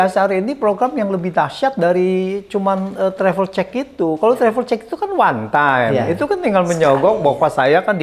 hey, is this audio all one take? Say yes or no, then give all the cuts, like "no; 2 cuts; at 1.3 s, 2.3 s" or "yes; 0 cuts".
yes; 0 cuts